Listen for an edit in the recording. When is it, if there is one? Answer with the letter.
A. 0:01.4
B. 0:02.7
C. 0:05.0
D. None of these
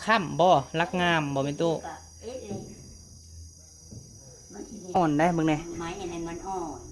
C